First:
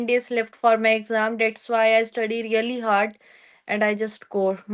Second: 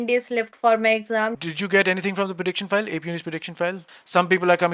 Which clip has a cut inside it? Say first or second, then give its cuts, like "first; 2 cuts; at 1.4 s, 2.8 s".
second; 2 cuts; at 1.3 s, 3.9 s